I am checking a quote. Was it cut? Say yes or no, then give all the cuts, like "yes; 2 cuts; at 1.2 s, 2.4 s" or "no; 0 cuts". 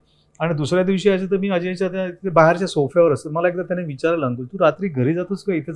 no; 0 cuts